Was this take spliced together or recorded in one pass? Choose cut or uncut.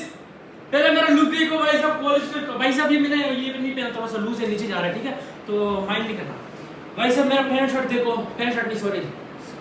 uncut